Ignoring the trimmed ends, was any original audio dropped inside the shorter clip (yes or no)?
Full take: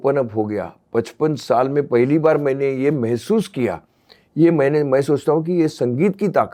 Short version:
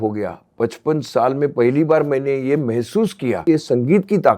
yes